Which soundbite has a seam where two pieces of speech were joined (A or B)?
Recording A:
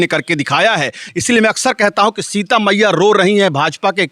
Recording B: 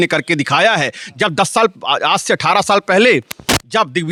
A